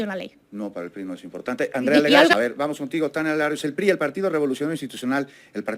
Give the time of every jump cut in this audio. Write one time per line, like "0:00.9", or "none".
0:02.3

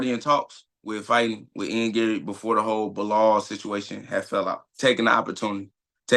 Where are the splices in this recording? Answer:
0:04.7

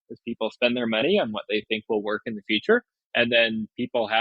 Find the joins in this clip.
0:03.0

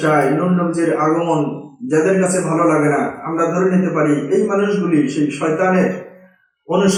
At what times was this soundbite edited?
none

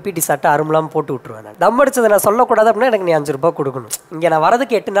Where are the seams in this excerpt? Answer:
0:01.5
0:03.9

